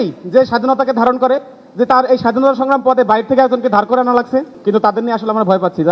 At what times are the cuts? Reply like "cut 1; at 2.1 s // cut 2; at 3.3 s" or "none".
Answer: cut 1; at 4.5 s